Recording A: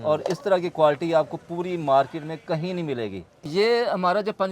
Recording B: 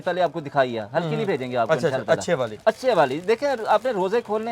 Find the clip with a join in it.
A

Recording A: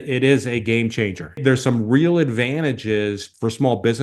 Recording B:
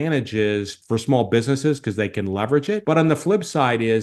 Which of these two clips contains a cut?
A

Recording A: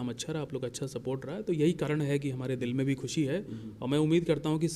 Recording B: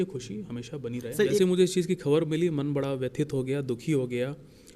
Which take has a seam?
B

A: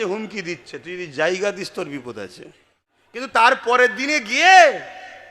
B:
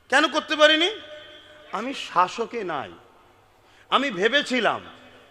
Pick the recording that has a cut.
A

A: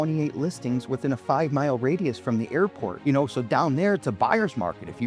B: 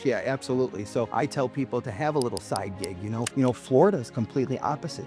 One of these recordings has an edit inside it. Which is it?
B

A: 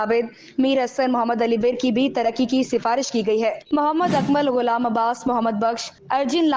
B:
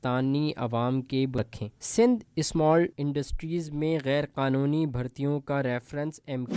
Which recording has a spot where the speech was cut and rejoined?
B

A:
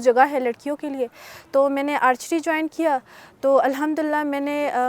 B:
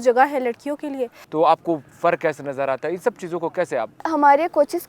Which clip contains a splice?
B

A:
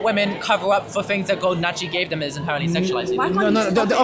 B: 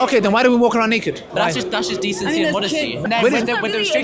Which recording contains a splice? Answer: B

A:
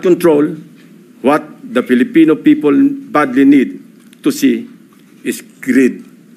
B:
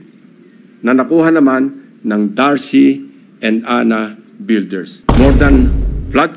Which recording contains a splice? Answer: B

